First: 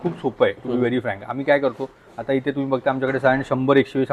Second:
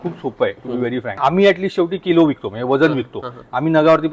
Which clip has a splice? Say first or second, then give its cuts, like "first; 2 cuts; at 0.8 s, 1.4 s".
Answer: second; 1 cut; at 1.2 s